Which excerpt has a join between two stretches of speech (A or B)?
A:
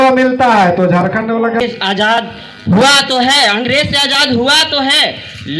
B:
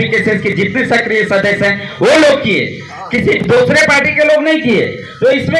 A